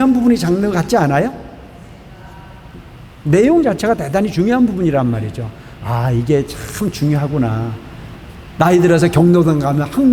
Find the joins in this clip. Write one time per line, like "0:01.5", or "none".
0:08.0